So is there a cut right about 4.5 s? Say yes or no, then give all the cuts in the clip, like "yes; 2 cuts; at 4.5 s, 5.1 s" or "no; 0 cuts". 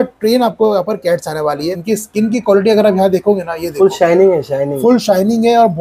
no; 1 cut; at 1.7 s